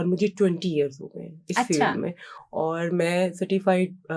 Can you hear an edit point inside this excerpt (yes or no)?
no